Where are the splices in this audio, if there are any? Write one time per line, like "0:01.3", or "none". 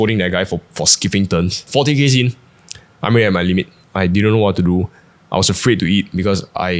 0:01.6